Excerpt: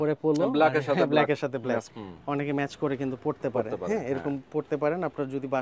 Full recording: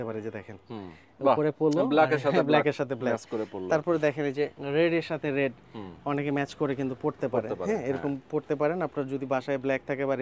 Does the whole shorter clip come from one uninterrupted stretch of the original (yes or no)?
no